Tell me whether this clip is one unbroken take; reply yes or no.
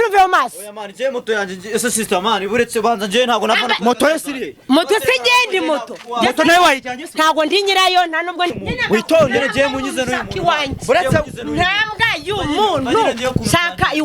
no